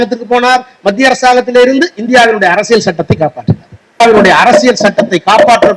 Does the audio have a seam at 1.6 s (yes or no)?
no